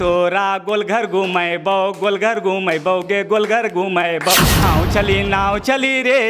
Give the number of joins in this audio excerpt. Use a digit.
1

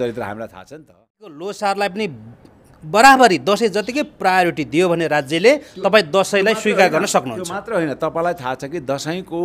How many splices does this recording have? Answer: 1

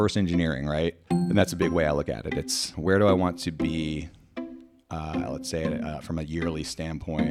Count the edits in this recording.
2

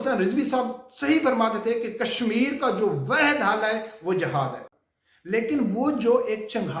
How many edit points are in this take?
1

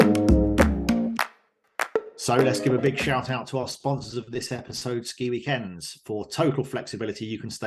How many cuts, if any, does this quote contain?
1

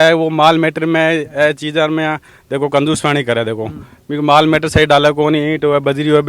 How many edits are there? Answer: 0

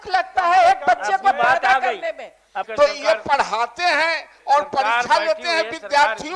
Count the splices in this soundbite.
1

